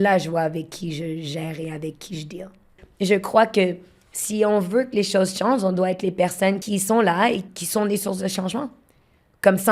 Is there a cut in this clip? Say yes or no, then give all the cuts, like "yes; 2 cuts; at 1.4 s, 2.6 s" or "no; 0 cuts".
yes; 3 cuts; at 2.8 s, 6.6 s, 7.5 s